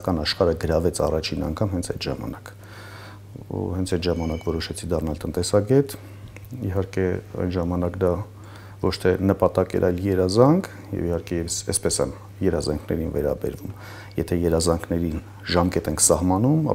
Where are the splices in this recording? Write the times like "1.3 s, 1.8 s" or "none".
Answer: none

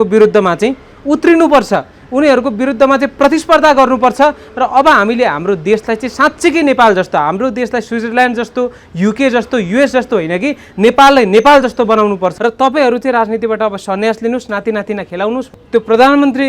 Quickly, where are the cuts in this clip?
12.3 s, 15.5 s

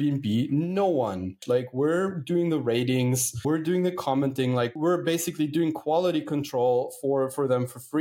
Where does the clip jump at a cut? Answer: 1.4 s, 3.4 s, 4.7 s

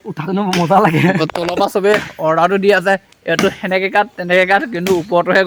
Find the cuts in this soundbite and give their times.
none

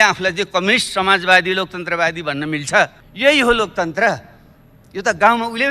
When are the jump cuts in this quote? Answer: 3.0 s

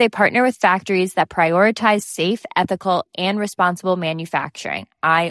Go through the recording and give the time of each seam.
none

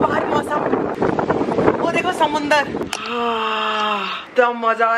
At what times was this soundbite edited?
0.9 s

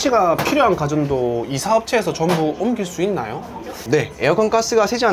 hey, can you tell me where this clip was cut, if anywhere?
none

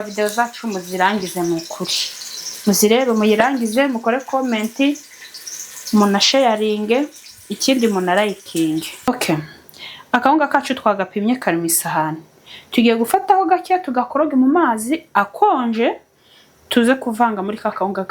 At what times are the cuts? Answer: 9.1 s

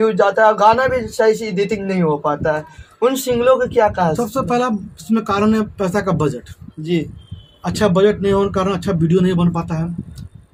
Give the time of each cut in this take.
none

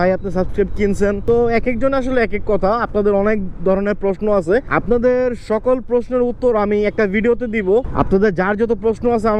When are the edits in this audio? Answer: none

